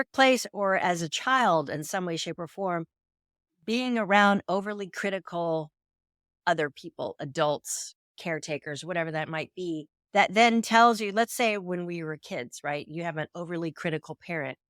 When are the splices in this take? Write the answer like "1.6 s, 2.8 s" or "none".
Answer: none